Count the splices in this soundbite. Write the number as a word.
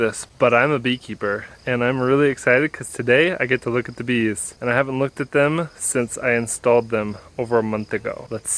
zero